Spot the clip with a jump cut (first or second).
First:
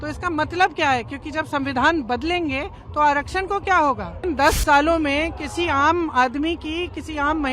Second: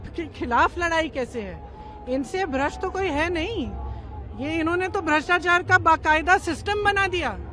first